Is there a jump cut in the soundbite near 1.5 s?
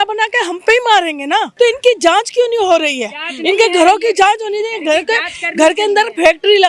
yes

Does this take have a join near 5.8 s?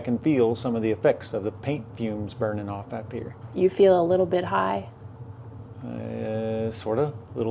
no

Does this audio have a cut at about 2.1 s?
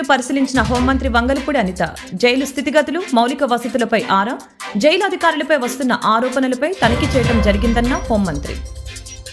no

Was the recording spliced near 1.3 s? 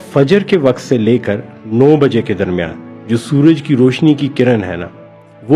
no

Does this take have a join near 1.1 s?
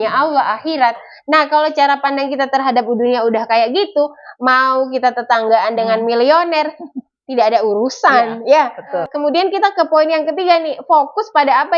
yes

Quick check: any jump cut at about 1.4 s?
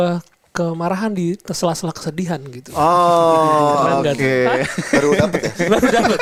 no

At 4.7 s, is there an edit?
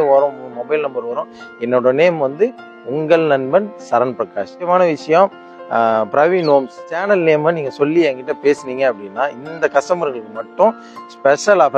yes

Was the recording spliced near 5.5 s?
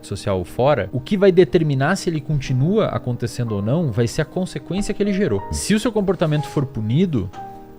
yes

